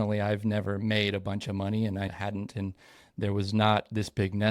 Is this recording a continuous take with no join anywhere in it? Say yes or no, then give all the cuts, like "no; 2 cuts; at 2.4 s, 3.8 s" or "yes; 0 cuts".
no; 1 cut; at 2.1 s